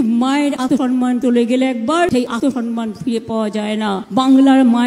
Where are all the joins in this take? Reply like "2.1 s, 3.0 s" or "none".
0.9 s, 2.5 s

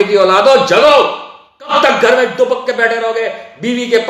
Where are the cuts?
1.7 s

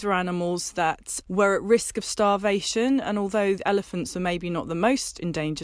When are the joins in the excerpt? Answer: 1.1 s

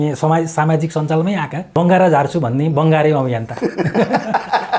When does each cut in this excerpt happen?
1.6 s

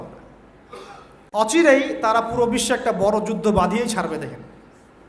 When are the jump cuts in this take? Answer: 1.5 s

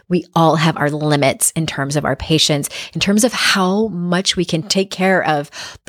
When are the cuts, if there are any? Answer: 4.7 s

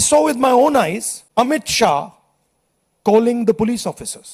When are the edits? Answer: 1.1 s

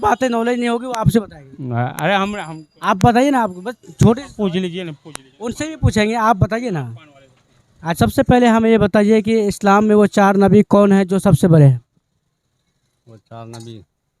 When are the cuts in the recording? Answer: 7.8 s

